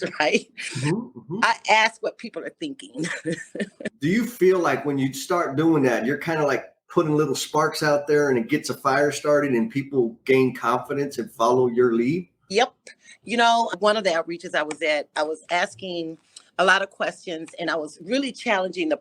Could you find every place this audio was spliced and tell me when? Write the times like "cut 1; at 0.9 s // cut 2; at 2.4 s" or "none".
cut 1; at 3.9 s // cut 2; at 13.7 s